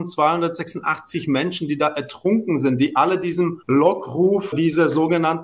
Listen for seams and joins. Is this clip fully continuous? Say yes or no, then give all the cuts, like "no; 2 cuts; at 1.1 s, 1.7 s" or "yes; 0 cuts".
no; 2 cuts; at 3.6 s, 4.5 s